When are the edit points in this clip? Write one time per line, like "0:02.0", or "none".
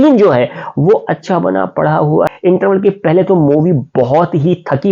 0:02.3